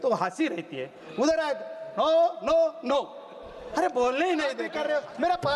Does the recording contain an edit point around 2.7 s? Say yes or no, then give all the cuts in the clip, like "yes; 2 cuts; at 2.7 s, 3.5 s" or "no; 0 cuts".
no; 1 cut; at 4.7 s